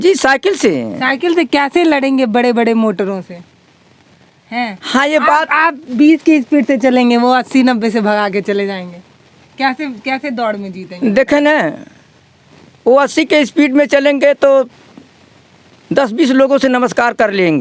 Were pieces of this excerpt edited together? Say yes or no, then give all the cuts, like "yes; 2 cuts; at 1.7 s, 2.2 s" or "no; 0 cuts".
no; 0 cuts